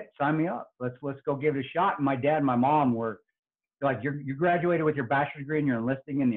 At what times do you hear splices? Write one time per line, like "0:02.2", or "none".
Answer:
none